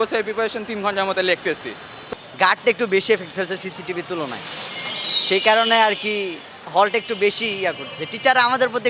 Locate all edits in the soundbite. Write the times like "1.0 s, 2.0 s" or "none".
2.0 s